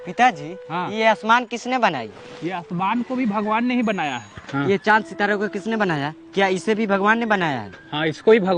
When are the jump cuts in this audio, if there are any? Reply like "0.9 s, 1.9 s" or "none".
none